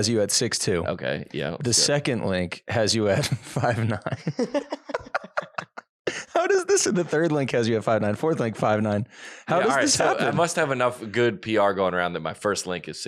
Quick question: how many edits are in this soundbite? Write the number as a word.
zero